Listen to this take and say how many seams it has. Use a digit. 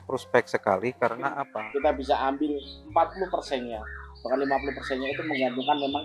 1